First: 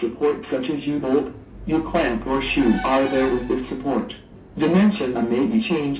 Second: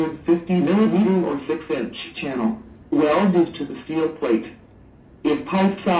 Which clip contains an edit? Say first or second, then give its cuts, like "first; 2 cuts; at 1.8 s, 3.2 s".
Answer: second; 1 cut; at 4.5 s